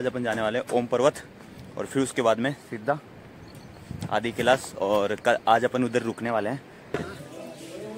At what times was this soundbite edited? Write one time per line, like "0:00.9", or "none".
0:06.9